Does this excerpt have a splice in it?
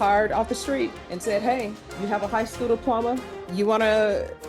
yes; 3 cuts; at 1.1 s, 1.8 s, 3.4 s

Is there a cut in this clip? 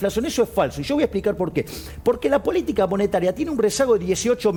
no; 0 cuts

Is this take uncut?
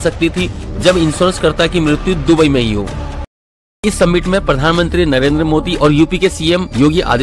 no; 1 cut; at 3.7 s

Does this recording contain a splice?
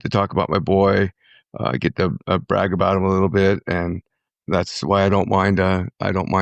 yes; 1 cut; at 4.2 s

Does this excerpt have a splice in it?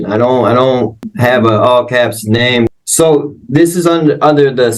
yes; 2 cuts; at 1.1 s, 2.7 s

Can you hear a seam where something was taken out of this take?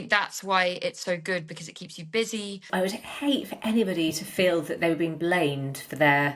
yes; 1 cut; at 2.6 s

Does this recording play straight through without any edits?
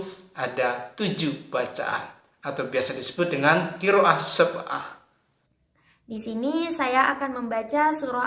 no; 1 cut; at 5.3 s

